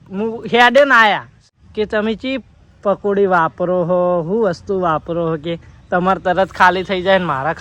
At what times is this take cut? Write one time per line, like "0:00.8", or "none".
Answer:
0:01.3